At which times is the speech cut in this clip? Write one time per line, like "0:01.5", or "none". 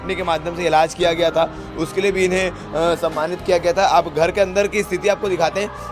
none